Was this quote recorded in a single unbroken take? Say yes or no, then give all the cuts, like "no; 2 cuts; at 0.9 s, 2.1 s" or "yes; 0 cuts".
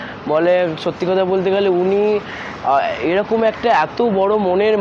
yes; 0 cuts